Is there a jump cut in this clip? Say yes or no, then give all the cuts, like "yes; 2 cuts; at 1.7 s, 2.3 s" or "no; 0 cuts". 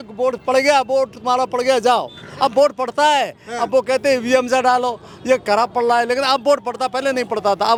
no; 0 cuts